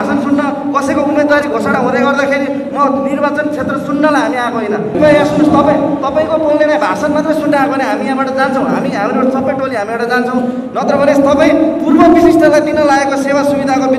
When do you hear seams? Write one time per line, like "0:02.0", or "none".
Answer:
0:04.9